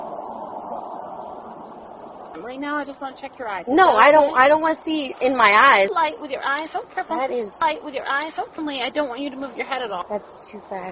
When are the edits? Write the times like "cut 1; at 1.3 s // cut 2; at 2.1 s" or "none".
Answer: cut 1; at 2.3 s // cut 2; at 5.9 s // cut 3; at 8.6 s // cut 4; at 10.0 s